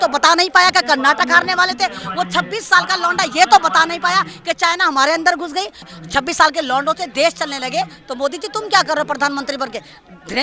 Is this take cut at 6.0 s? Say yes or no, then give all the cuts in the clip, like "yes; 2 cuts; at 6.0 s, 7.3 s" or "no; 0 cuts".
yes; 1 cut; at 6.0 s